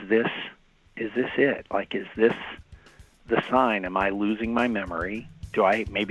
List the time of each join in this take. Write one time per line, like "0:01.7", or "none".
none